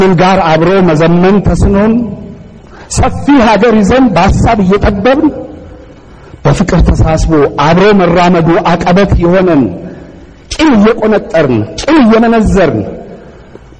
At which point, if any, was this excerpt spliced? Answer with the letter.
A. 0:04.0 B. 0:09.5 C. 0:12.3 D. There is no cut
A